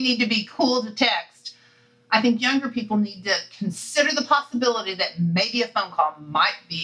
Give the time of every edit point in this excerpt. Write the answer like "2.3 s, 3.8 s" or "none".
none